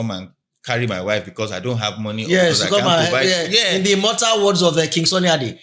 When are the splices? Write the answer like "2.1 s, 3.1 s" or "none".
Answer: none